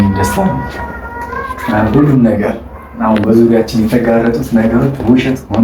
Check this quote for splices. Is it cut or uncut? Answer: uncut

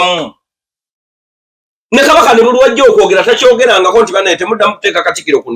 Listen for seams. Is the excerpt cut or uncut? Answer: uncut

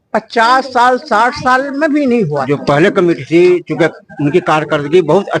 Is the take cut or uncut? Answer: cut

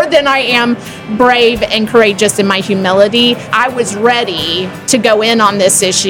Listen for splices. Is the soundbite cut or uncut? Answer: cut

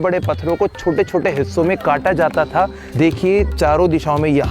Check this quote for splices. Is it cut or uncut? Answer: cut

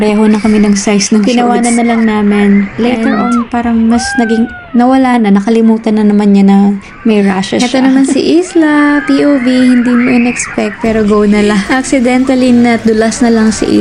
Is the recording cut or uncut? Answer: uncut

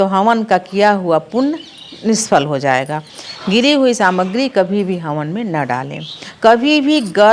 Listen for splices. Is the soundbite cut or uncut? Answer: uncut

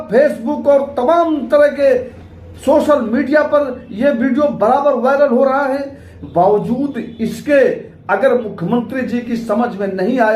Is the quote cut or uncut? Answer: cut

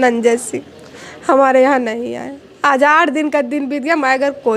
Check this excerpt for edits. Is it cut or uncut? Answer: uncut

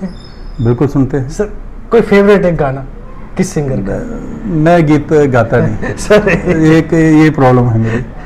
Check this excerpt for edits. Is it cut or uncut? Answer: uncut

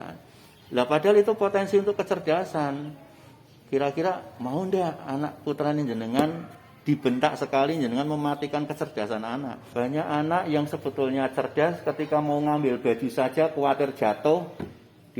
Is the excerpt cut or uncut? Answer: cut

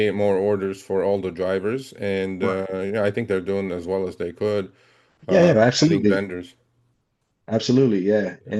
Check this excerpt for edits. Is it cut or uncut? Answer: uncut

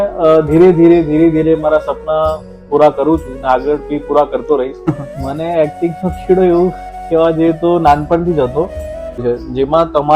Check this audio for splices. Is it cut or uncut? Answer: cut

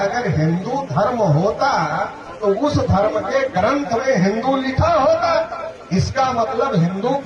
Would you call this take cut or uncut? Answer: uncut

